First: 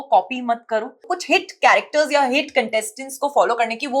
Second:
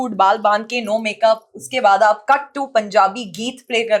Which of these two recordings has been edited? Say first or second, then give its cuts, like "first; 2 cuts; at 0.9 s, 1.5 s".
first; 1 cut; at 1.0 s